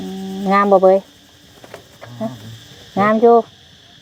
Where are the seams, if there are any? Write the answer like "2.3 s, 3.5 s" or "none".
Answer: none